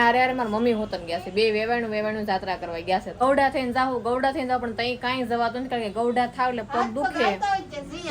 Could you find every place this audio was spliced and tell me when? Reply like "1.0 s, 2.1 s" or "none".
3.2 s